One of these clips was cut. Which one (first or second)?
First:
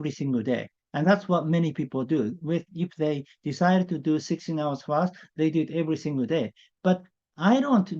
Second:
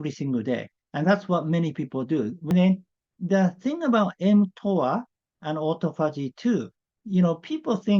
second